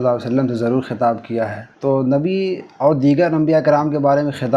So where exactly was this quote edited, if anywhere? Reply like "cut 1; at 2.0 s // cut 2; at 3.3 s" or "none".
cut 1; at 1.6 s